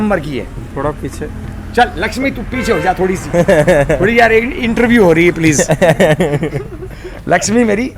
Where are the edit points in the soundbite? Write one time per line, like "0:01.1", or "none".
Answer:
none

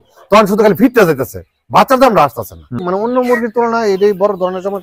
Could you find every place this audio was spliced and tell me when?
0:02.8

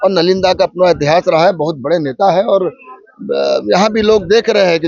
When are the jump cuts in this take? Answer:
none

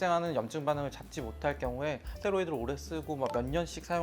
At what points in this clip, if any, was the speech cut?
0:02.1

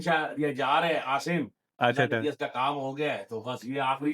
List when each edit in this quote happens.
none

